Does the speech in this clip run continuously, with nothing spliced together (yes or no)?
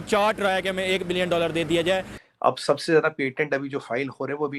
no